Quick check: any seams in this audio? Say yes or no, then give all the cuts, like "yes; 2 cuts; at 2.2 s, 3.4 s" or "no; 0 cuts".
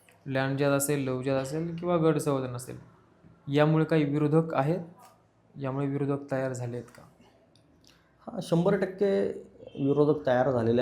no; 0 cuts